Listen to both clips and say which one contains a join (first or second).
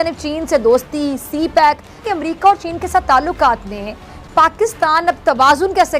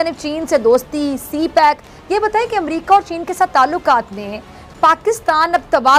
first